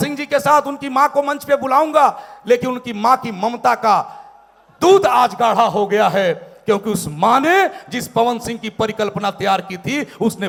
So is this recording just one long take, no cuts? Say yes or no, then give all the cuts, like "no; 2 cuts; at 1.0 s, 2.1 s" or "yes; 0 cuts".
yes; 0 cuts